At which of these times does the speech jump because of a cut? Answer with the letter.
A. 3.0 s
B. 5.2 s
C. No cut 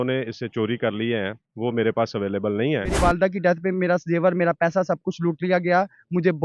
A